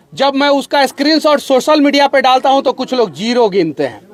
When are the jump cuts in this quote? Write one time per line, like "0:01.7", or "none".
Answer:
none